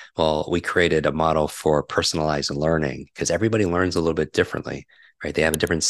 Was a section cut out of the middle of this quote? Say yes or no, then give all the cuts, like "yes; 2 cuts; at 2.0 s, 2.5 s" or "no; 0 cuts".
no; 0 cuts